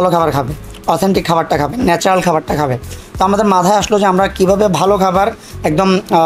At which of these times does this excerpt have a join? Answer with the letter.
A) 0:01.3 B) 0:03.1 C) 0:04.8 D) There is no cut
D